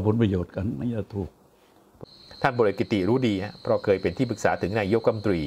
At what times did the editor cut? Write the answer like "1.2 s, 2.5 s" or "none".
1.9 s

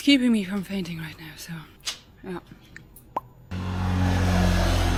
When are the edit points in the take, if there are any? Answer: none

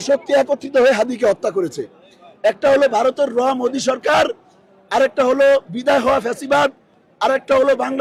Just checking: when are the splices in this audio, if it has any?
none

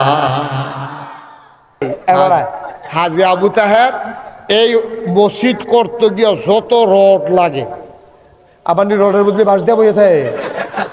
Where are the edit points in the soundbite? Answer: 1.8 s

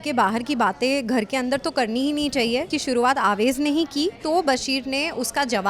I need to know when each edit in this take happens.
2.7 s, 4.2 s

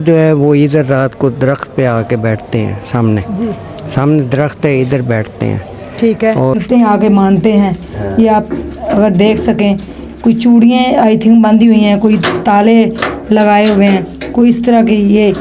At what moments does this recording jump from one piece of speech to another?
6.6 s

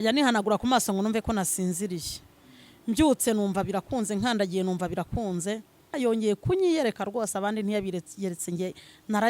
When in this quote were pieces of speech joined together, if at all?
5.9 s

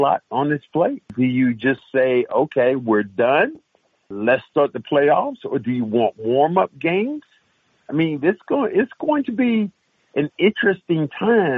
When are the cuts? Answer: 1.1 s, 4.1 s

